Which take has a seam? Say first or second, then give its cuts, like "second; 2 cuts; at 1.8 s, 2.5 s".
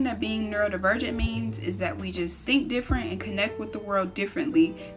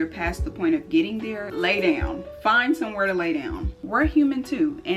second; 1 cut; at 3.7 s